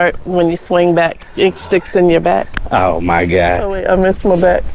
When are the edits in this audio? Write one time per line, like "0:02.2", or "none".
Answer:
0:02.6

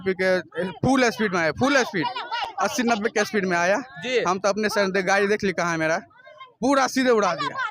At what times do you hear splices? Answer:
none

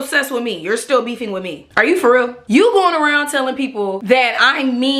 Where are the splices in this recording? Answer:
0:02.4
0:04.0

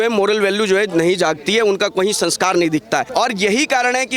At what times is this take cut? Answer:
0:03.1

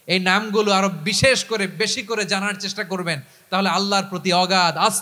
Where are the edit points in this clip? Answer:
none

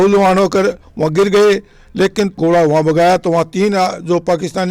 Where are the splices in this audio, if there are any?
0:02.4

